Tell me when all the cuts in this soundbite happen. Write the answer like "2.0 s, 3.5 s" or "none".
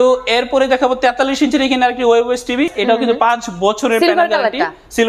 2.7 s